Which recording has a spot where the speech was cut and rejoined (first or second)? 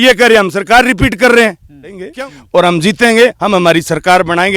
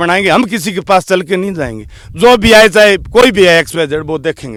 first